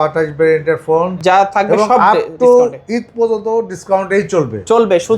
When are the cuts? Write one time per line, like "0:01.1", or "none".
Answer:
0:01.1